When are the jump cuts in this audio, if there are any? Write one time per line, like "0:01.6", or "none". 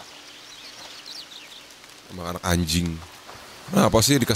0:01.0